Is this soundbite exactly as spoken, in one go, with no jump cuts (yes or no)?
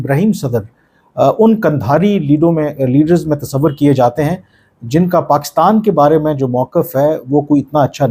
yes